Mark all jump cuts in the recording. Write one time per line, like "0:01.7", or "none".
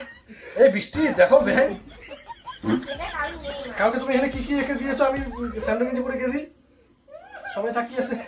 none